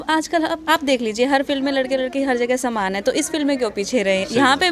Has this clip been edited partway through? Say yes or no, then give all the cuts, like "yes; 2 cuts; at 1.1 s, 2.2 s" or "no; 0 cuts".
no; 0 cuts